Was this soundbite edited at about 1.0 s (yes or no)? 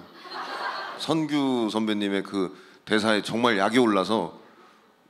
yes